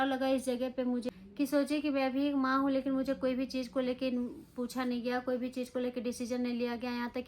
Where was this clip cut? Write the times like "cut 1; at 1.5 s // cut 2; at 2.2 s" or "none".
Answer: cut 1; at 1.1 s